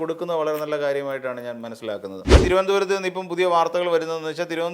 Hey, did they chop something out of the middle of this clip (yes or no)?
yes